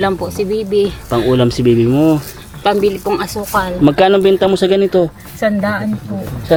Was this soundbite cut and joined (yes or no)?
no